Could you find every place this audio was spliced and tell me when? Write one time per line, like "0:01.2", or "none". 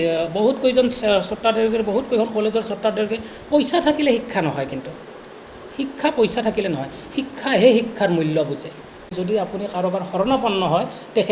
0:09.1

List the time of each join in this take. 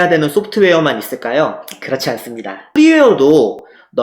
0:02.6

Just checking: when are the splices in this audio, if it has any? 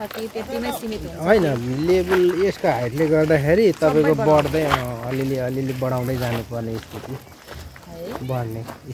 none

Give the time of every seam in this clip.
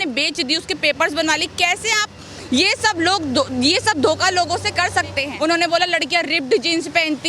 0:05.2

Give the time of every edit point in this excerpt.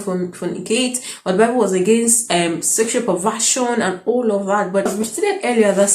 0:04.9

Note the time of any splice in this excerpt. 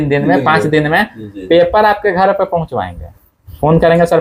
none

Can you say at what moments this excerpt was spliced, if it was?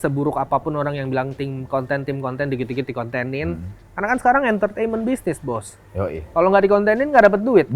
none

